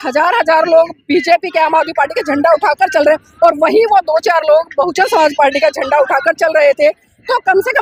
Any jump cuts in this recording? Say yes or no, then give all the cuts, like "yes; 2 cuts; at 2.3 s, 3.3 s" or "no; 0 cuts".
no; 0 cuts